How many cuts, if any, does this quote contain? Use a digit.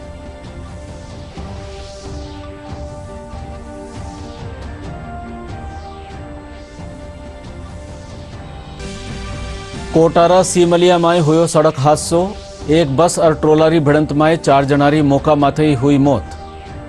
0